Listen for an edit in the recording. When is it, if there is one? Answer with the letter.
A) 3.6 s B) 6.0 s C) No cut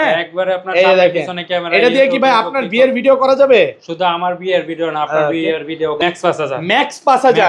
B